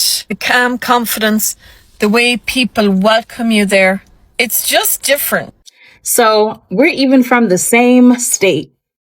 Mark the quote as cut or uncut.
cut